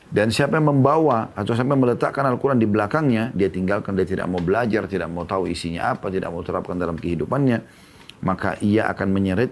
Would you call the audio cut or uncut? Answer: uncut